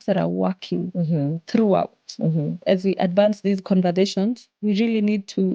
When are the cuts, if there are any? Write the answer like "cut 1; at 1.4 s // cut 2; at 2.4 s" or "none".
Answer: cut 1; at 2.6 s